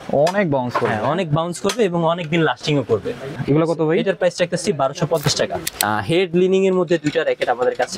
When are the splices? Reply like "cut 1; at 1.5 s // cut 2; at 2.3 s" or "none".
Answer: cut 1; at 3.4 s // cut 2; at 5.6 s

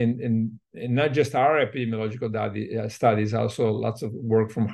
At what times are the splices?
none

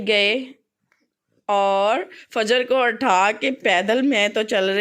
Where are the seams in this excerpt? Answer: none

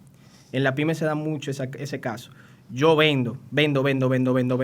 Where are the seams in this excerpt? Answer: none

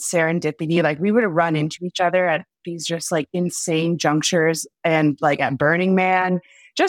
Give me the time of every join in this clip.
none

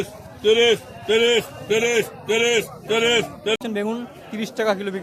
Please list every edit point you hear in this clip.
cut 1; at 3.6 s

